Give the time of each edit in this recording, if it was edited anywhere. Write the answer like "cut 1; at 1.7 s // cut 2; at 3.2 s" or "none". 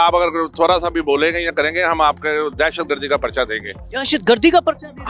none